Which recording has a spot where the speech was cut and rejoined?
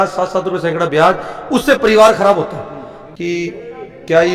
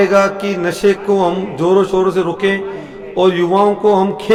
first; 1 cut; at 3.1 s

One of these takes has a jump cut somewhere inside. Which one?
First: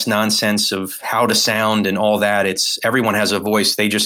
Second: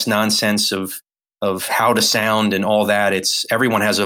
first; 1 cut; at 1.0 s

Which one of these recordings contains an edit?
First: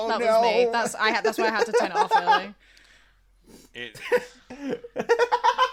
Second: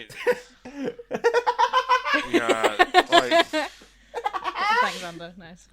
second; 1 cut; at 3.5 s

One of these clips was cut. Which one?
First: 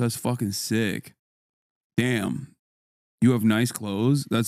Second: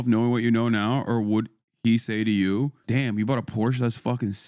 second; 1 cut; at 2.8 s

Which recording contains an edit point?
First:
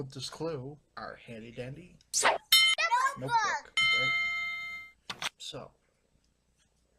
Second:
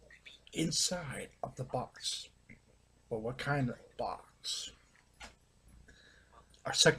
first; 1 cut; at 3.1 s

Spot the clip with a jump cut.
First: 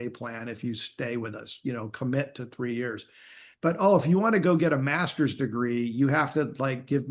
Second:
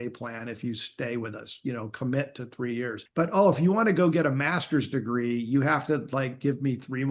second; 1 cut; at 3.0 s

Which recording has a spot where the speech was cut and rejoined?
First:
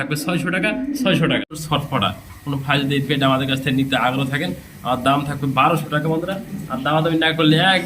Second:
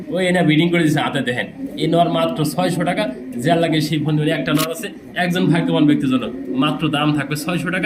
first; 1 cut; at 1.6 s

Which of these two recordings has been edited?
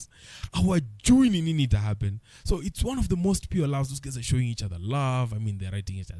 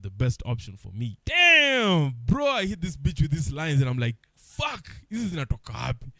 second; 1 cut; at 1.2 s

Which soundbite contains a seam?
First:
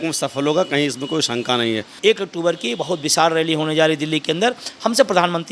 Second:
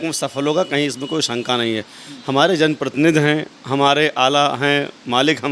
first; 1 cut; at 1.9 s

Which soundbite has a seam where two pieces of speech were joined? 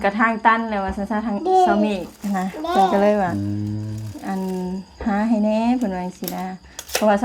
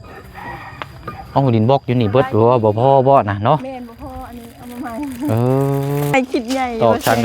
second; 1 cut; at 6.1 s

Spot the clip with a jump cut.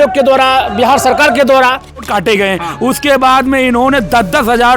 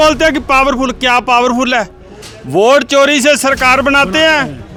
first; 1 cut; at 2.1 s

